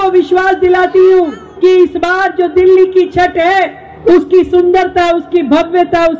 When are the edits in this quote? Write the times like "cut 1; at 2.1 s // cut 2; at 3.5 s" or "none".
cut 1; at 1.4 s // cut 2; at 3.8 s

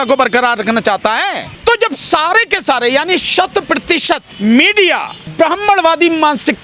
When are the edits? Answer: cut 1; at 1.5 s // cut 2; at 4.3 s // cut 3; at 5.2 s

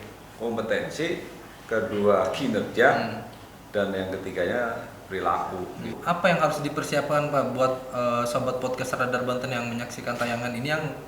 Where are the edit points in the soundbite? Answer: cut 1; at 6.0 s

